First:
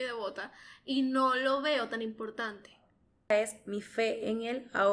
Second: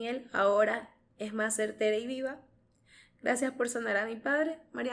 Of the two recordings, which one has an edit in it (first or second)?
first